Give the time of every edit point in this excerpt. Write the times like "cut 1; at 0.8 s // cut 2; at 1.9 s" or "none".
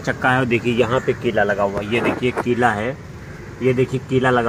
none